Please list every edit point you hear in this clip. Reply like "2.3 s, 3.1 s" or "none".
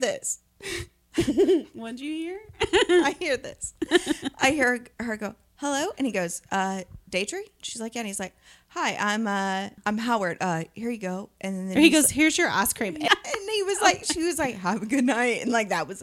9.8 s, 13.1 s